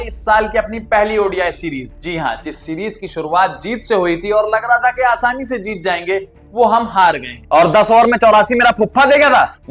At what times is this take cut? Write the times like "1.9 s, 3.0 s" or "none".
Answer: 1.9 s, 7.4 s